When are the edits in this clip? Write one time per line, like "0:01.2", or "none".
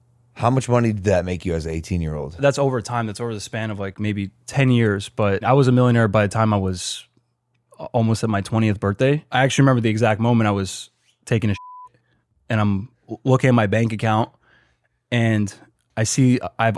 0:02.4
0:05.4
0:09.2